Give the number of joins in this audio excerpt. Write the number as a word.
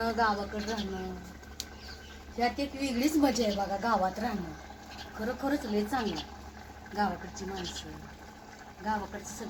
zero